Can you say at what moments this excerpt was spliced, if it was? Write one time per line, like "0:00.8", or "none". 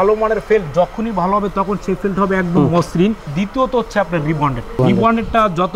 0:03.3
0:04.8